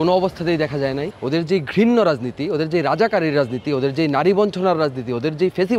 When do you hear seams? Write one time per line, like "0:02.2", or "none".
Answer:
0:01.1